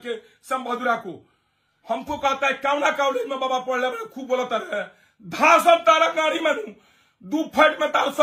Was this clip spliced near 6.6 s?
no; 1 cut; at 1.7 s

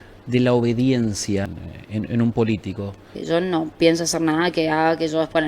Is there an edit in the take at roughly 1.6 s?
yes; 2 cuts; at 1.6 s, 3.2 s

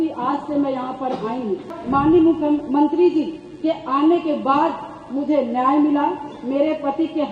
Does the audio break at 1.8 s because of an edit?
yes; 1 cut; at 1.8 s

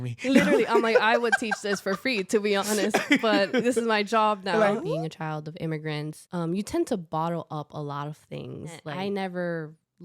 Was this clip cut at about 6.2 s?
yes; 3 cuts; at 4.8 s, 6.2 s, 8.9 s

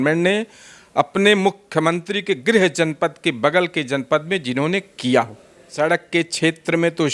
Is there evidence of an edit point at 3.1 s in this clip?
no; 1 cut; at 5.7 s

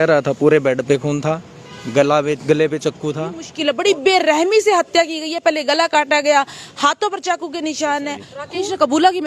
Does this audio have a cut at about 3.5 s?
yes; 2 cuts; at 3.5 s, 8.3 s

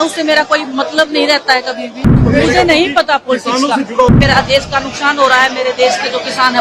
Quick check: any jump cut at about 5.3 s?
no; 2 cuts; at 2.2 s, 4.1 s

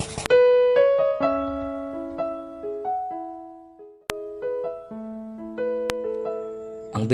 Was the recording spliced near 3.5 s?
no; 0 cuts

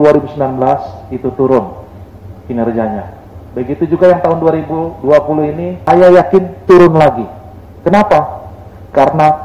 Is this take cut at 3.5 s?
no; 1 cut; at 5.7 s

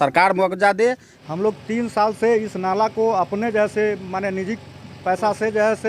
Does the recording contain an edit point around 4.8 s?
no; 1 cut; at 1.1 s

